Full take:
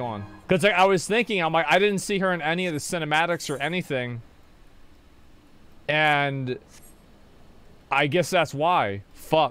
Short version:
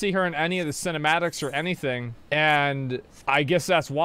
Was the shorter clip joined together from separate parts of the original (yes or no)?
yes